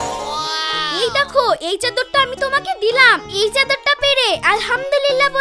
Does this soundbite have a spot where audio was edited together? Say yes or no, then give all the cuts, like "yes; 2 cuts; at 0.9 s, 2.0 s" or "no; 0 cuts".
no; 0 cuts